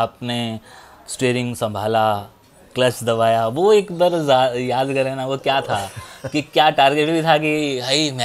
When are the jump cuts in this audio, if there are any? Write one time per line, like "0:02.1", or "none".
none